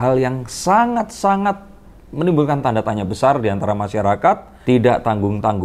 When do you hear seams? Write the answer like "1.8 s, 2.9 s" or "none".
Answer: 4.5 s